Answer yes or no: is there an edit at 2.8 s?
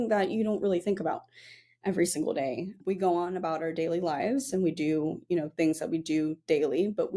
yes